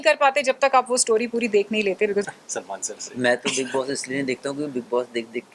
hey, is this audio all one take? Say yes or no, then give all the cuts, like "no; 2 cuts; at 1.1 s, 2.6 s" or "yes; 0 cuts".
no; 1 cut; at 2.2 s